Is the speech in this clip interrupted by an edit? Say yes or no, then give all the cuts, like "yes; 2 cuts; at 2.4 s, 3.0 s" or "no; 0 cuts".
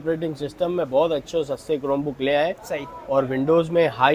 no; 0 cuts